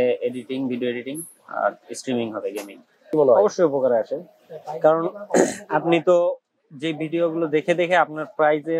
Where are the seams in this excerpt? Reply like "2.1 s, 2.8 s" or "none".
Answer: 3.1 s